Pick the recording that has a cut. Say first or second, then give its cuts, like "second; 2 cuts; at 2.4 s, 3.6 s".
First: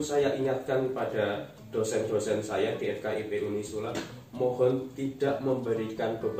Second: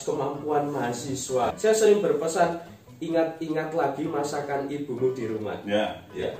second; 1 cut; at 1.5 s